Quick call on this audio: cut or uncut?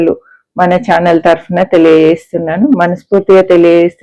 uncut